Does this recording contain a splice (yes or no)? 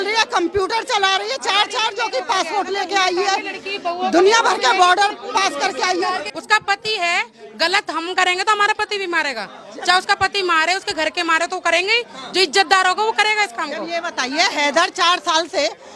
yes